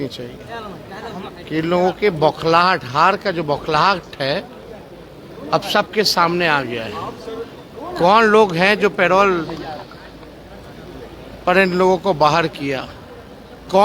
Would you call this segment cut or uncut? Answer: uncut